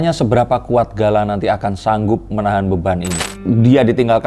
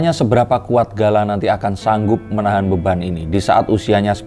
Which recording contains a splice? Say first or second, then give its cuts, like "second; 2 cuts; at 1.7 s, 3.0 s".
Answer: first; 1 cut; at 3.2 s